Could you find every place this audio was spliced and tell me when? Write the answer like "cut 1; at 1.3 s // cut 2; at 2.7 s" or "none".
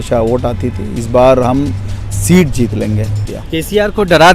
cut 1; at 3.2 s